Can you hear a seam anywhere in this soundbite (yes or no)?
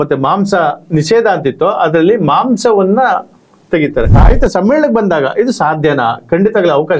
yes